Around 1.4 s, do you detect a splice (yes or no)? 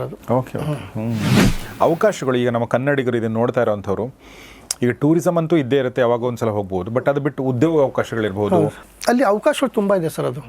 yes